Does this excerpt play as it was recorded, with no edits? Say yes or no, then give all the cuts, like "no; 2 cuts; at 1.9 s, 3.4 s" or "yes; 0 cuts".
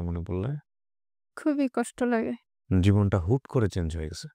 yes; 0 cuts